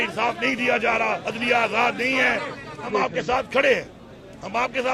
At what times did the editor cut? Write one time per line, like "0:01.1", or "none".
0:01.3
0:02.9